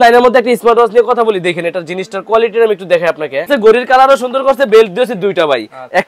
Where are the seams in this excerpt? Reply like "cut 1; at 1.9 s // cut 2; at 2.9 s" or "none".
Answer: cut 1; at 3.5 s

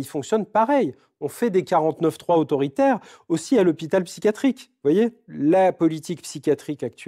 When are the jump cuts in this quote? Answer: cut 1; at 5.2 s

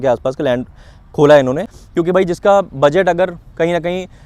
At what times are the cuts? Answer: cut 1; at 1.7 s

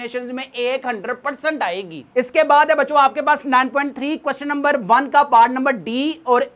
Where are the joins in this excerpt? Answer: none

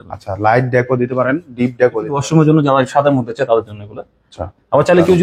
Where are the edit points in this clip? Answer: cut 1; at 2.1 s

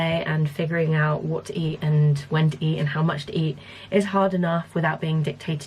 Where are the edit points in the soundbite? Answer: none

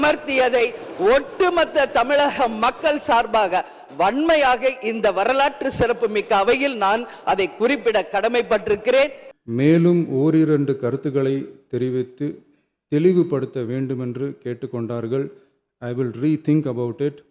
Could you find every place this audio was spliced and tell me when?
cut 1; at 9.3 s

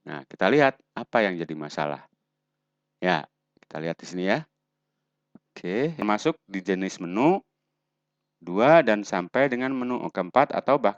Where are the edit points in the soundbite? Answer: cut 1; at 6.0 s

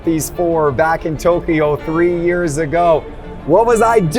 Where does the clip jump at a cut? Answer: none

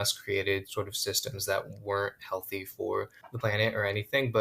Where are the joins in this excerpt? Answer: cut 1; at 3.2 s

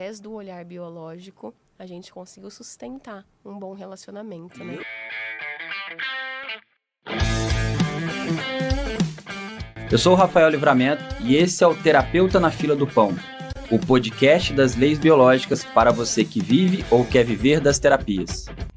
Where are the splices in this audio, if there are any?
cut 1; at 4.8 s

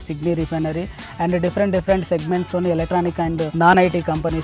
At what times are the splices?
cut 1; at 3.5 s

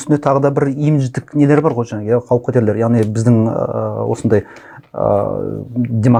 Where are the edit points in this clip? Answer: none

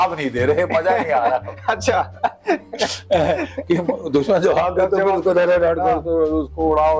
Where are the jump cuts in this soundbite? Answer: none

